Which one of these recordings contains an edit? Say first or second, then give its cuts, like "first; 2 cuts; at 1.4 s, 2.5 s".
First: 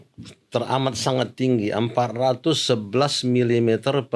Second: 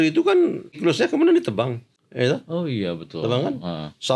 second; 2 cuts; at 0.8 s, 1.9 s